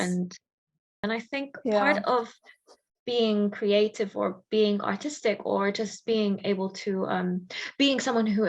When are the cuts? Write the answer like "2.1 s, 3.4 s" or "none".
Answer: 1.0 s